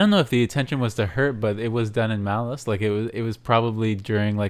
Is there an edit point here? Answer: no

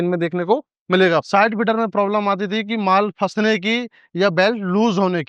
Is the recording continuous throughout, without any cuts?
no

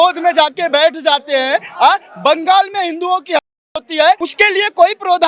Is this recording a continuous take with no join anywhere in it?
no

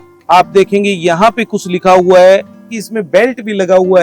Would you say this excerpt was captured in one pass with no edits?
no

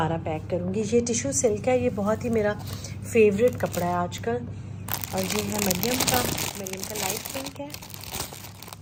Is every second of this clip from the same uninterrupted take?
yes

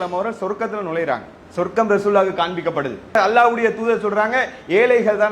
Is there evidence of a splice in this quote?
yes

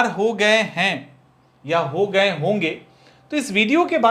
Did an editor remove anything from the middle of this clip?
no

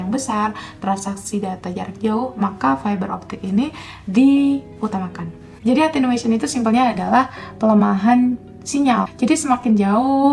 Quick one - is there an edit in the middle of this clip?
yes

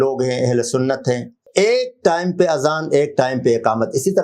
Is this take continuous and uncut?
no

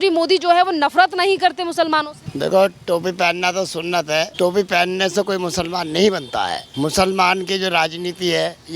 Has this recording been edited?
yes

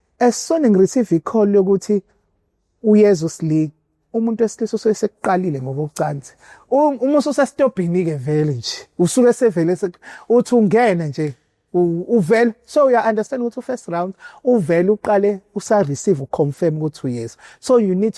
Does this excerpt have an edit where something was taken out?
no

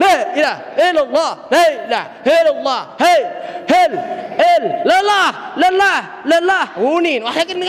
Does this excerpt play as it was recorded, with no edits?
yes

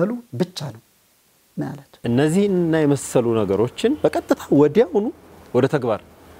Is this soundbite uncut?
no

